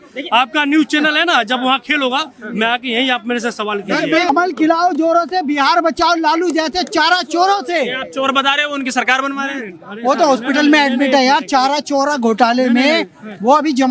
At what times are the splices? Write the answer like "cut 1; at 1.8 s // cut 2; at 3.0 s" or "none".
cut 1; at 4.3 s

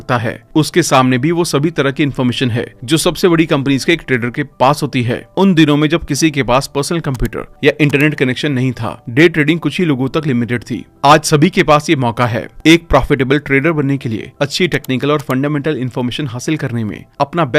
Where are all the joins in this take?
none

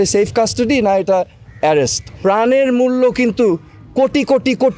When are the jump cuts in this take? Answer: cut 1; at 2.1 s

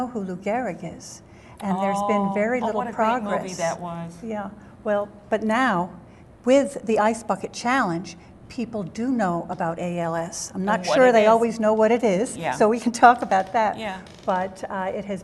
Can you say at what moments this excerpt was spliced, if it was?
none

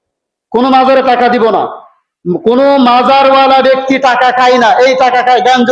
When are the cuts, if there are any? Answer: none

